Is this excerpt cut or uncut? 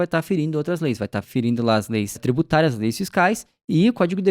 cut